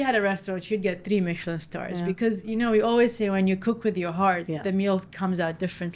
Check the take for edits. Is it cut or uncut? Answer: uncut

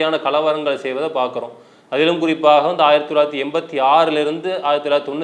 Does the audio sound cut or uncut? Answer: uncut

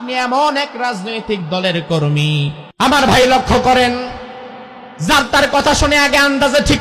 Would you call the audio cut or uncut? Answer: cut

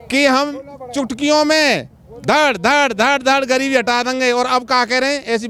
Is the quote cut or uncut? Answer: uncut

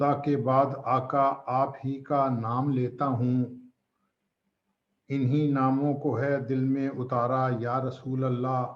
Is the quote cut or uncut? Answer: uncut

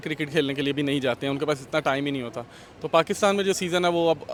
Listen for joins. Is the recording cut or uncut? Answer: uncut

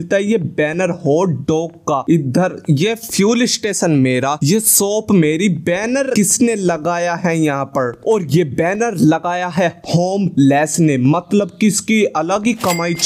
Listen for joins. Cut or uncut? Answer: cut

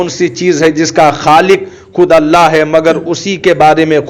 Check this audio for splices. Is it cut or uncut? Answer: uncut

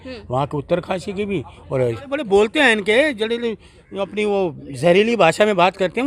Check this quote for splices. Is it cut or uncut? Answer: cut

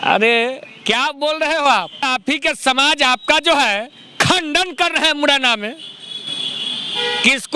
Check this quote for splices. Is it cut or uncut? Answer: cut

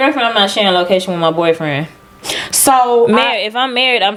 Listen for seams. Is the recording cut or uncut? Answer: uncut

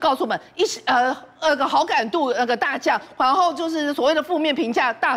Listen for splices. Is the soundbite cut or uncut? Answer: uncut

